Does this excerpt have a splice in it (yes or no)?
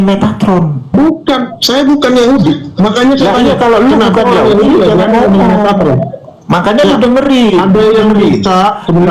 no